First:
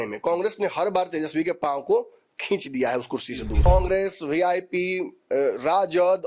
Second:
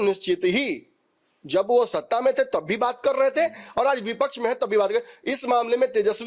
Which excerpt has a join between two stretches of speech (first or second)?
first